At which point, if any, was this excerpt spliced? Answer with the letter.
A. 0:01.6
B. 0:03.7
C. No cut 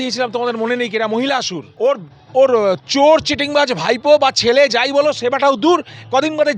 A